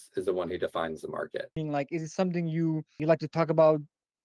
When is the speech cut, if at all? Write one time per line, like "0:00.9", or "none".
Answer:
0:01.6
0:02.9